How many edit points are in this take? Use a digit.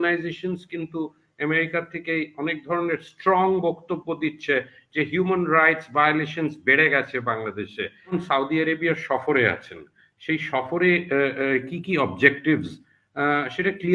1